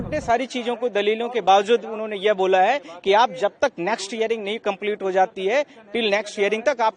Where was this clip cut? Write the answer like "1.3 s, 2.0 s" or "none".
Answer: none